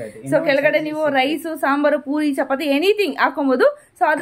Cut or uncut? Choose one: uncut